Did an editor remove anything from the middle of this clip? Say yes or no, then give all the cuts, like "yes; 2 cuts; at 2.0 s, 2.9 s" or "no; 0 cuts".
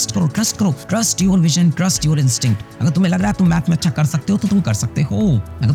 no; 0 cuts